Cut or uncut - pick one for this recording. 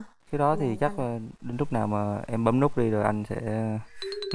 uncut